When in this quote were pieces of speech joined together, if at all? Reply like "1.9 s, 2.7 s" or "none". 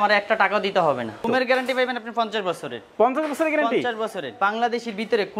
1.2 s, 4.3 s